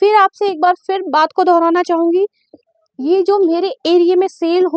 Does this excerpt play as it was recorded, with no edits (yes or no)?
yes